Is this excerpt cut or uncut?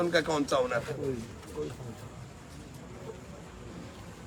uncut